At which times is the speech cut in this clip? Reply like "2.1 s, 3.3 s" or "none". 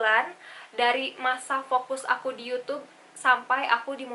none